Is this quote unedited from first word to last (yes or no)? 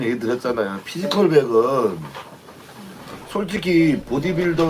yes